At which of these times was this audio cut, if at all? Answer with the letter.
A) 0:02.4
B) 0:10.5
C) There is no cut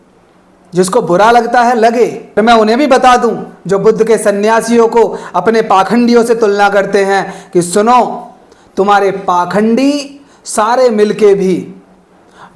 A